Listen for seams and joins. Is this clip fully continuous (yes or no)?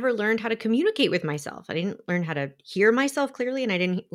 yes